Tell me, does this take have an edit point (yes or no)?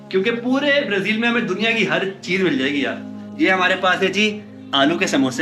yes